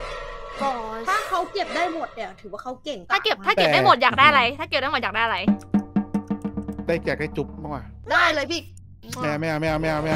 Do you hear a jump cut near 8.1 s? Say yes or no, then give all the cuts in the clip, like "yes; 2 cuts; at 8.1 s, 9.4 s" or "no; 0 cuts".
yes; 2 cuts; at 3.0 s, 8.1 s